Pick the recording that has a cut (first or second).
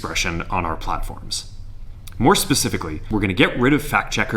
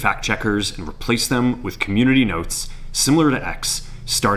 first